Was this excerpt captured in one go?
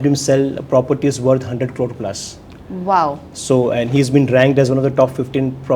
yes; 0 cuts

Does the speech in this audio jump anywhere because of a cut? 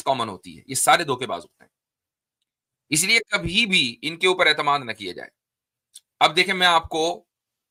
no; 0 cuts

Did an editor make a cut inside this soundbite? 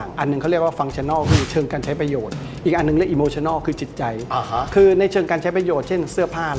no; 0 cuts

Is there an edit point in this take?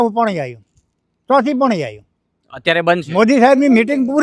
no; 0 cuts

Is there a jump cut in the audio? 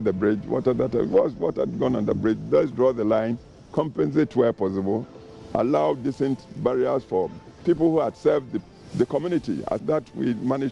yes; 1 cut; at 9.8 s

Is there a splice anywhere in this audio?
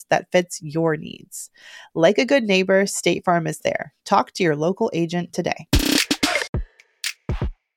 yes; 1 cut; at 6.5 s

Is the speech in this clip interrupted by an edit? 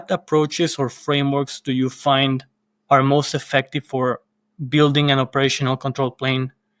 no; 0 cuts

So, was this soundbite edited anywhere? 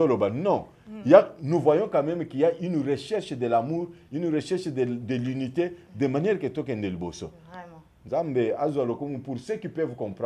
no; 0 cuts

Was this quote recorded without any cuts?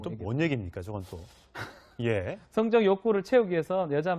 no; 1 cut; at 3.0 s

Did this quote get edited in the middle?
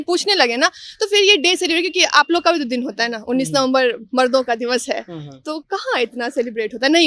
no; 0 cuts

